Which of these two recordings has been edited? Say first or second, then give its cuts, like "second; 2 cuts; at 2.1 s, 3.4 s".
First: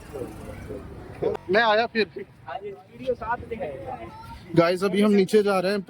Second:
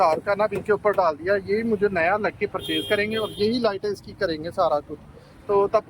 first; 1 cut; at 1.4 s